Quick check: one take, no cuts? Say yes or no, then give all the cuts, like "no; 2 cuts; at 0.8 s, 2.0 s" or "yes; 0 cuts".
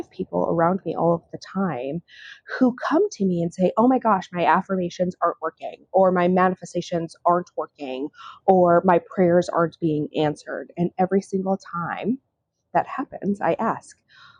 yes; 0 cuts